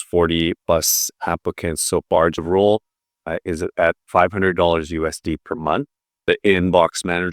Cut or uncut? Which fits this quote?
cut